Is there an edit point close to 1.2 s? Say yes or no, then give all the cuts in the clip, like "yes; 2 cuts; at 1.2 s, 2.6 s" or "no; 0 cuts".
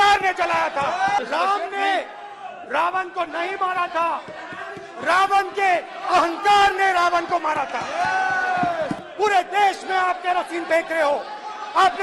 yes; 2 cuts; at 1.2 s, 9.0 s